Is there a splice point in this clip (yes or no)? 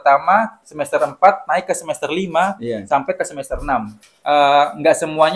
yes